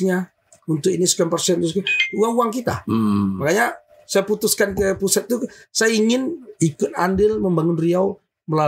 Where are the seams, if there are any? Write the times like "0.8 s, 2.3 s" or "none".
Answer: none